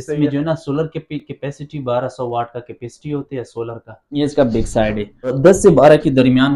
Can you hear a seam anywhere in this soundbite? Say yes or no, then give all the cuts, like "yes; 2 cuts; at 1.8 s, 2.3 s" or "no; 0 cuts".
yes; 2 cuts; at 4.2 s, 5.4 s